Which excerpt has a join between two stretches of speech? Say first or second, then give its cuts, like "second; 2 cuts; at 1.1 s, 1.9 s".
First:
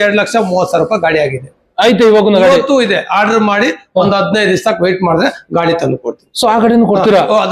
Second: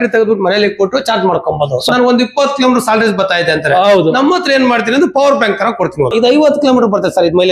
second; 2 cuts; at 1.9 s, 6.1 s